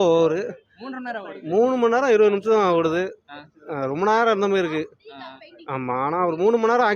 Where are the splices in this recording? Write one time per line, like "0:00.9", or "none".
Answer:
none

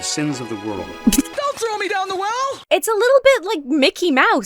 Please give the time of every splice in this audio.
0:01.3
0:02.6

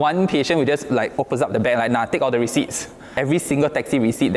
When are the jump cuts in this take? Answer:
0:03.1

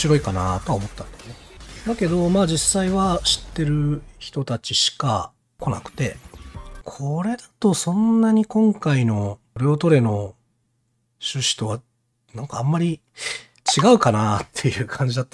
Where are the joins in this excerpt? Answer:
0:05.6
0:06.8
0:09.5

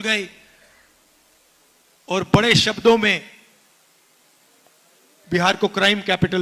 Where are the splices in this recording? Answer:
none

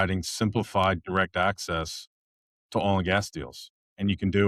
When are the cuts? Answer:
none

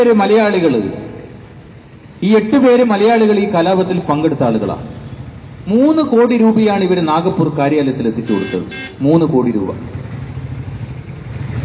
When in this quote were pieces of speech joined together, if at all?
0:03.5

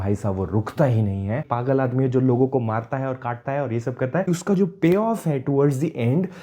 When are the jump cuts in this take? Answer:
0:01.4
0:04.2

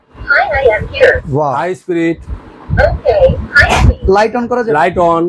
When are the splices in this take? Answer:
none

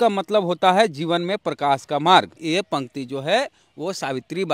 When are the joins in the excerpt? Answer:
0:02.4

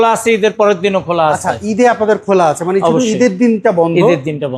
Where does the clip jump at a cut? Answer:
none

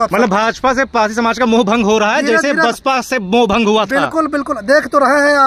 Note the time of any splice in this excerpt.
none

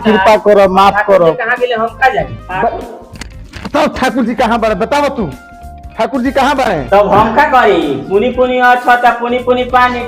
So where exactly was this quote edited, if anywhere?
0:02.3
0:06.8

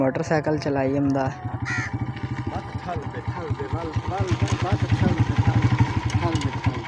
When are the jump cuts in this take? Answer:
none

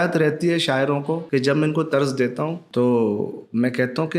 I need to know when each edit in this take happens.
0:01.2
0:02.6

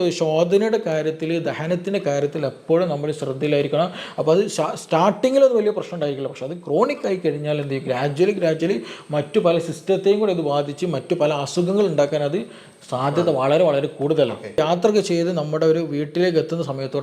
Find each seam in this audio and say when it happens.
0:14.6

